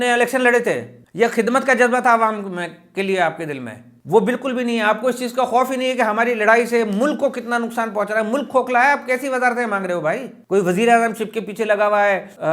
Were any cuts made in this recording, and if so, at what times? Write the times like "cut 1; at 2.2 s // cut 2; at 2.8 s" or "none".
none